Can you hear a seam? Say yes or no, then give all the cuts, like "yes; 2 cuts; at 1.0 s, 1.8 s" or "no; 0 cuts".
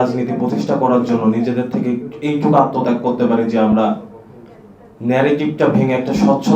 no; 0 cuts